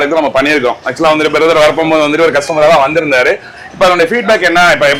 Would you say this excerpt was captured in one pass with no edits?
yes; 0 cuts

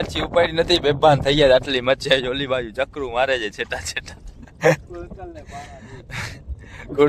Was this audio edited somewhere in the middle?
no; 0 cuts

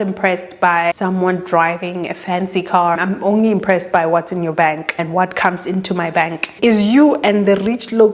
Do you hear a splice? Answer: yes; 4 cuts; at 0.9 s, 3.0 s, 4.9 s, 6.5 s

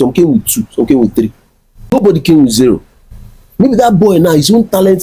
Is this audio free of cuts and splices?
no; 1 cut; at 1.9 s

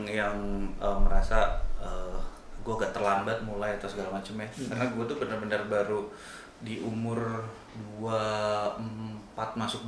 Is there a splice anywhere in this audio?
no; 0 cuts

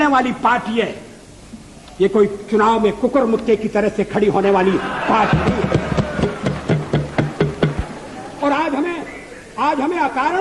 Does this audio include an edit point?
no; 0 cuts

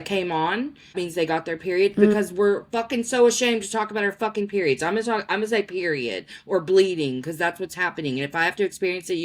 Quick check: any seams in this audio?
yes; 1 cut; at 0.9 s

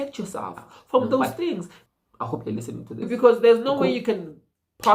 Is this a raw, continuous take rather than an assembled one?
no; 2 cuts; at 1.8 s, 3.1 s

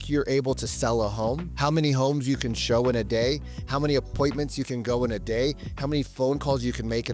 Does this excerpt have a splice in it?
yes; 1 cut; at 1.5 s

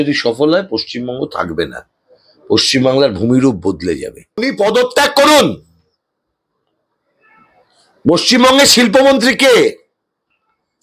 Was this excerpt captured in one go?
no; 1 cut; at 4.5 s

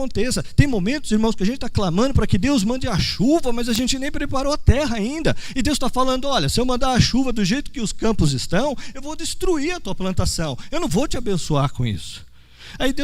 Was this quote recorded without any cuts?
yes; 0 cuts

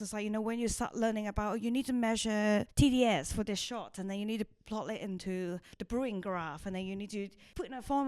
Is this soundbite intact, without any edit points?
no; 3 cuts; at 2.7 s, 5.7 s, 7.2 s

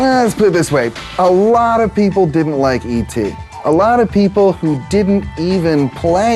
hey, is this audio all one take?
yes; 0 cuts

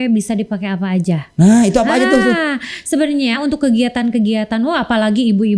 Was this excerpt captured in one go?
yes; 0 cuts

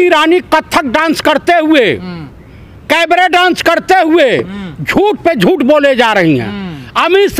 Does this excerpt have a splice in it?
no; 0 cuts

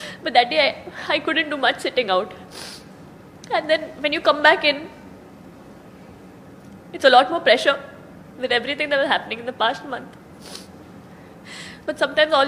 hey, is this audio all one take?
yes; 0 cuts

